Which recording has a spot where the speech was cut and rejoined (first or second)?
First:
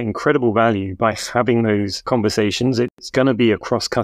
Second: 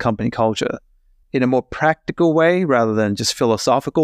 first